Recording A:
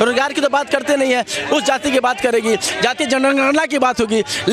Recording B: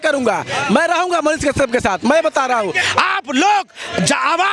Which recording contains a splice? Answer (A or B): B